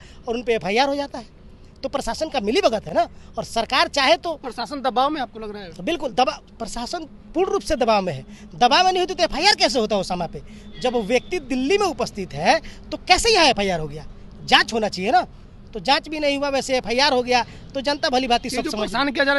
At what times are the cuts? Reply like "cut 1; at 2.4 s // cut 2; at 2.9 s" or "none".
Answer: none